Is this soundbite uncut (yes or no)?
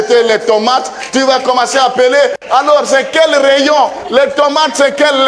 yes